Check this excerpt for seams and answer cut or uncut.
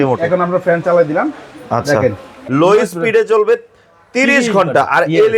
cut